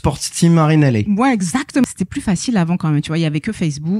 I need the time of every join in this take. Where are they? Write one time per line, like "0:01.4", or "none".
0:01.8

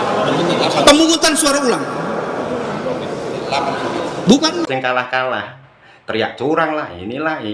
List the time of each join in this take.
0:04.7

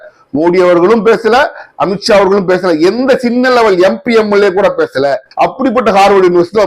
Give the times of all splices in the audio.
0:05.2

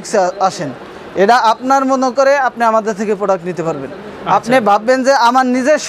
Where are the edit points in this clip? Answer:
none

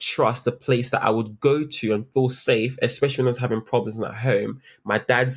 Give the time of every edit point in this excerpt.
none

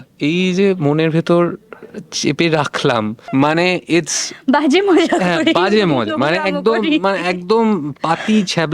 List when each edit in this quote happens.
0:03.2

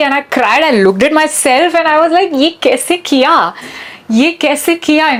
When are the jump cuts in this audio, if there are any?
none

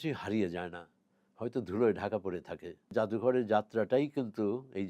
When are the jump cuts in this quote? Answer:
0:02.9

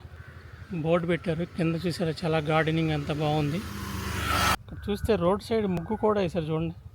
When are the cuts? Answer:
0:04.6

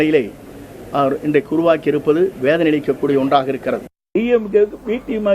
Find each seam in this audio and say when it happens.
0:04.1

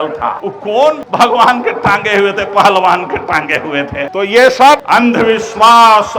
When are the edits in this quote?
0:00.9
0:04.1
0:04.8

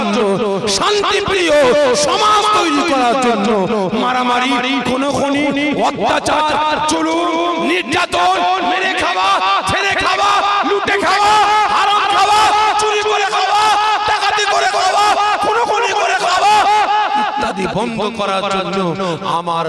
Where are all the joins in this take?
none

